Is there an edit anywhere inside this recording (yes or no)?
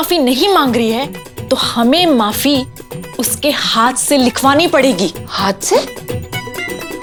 no